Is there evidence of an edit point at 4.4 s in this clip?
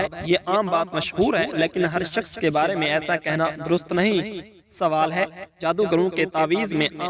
no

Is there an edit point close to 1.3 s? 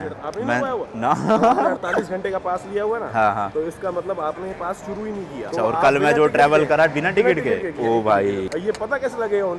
no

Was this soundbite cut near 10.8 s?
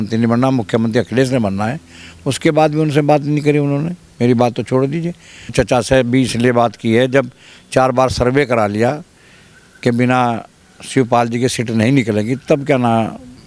no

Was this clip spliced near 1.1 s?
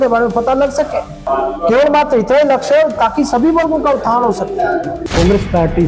yes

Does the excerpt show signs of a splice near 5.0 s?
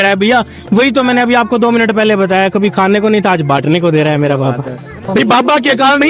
yes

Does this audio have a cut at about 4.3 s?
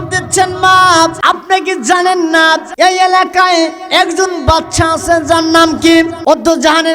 no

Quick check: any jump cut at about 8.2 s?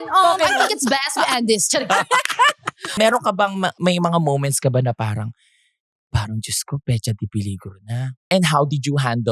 yes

